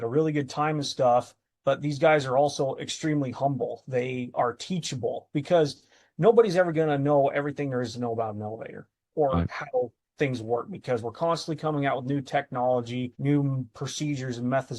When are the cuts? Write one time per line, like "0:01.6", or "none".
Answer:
0:13.1